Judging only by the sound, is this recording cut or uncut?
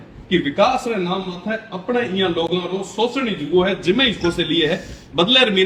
uncut